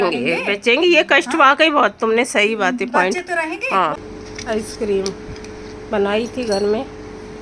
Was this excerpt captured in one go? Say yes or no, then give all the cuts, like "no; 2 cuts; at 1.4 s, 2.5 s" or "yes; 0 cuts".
no; 1 cut; at 4.0 s